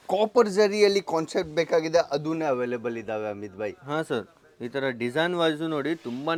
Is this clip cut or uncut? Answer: uncut